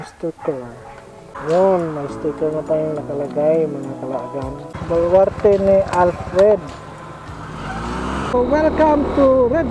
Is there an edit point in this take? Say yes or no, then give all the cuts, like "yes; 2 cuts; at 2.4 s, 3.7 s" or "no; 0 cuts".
yes; 3 cuts; at 1.2 s, 4.7 s, 8.3 s